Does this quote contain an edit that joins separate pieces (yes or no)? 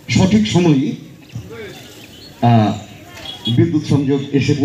no